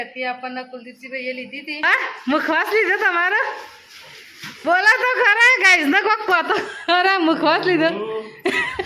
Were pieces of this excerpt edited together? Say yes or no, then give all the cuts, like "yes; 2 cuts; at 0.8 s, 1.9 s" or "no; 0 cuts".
yes; 1 cut; at 1.8 s